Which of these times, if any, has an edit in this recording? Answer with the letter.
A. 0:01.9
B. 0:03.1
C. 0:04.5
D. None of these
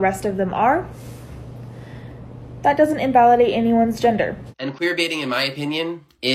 C